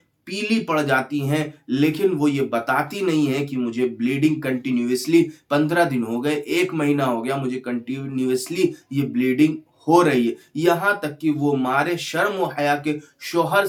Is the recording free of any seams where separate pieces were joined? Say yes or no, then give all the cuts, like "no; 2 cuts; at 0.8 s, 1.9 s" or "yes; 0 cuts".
yes; 0 cuts